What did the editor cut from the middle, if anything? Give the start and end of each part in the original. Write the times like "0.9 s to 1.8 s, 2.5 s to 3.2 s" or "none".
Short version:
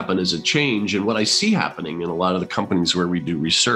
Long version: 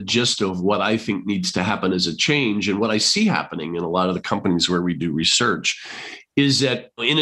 none